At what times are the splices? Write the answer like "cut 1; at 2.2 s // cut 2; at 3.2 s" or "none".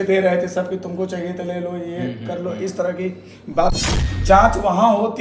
cut 1; at 3.7 s